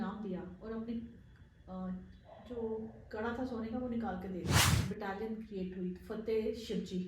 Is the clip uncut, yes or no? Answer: no